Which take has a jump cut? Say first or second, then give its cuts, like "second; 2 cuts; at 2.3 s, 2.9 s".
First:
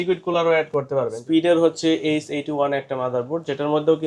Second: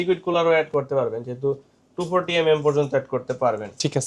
first; 1 cut; at 1.2 s